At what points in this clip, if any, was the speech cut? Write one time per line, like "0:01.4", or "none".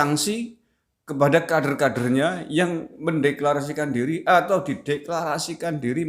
none